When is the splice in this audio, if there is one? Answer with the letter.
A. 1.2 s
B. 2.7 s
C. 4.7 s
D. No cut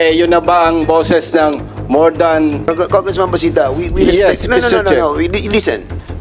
B